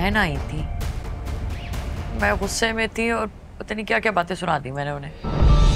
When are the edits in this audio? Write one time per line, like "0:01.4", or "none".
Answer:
none